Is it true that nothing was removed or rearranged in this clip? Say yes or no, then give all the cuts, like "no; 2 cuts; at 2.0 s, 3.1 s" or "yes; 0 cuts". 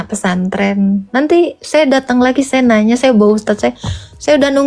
yes; 0 cuts